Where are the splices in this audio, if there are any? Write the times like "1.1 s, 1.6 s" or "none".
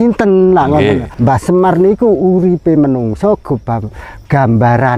1.1 s